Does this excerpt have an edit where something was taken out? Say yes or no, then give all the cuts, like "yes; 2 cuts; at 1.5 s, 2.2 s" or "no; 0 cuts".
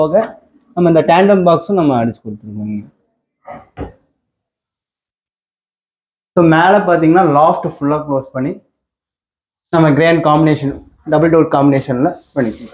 no; 0 cuts